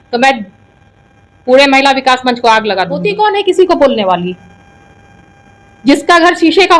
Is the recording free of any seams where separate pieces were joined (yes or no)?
no